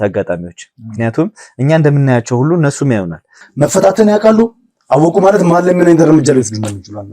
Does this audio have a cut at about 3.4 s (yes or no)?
yes